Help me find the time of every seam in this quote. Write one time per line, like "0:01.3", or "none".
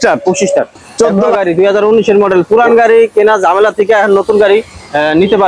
0:01.2